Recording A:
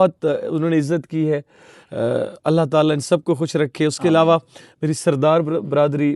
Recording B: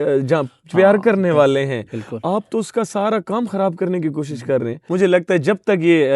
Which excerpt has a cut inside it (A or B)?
B